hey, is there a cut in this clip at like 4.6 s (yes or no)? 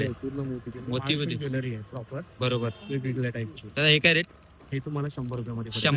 no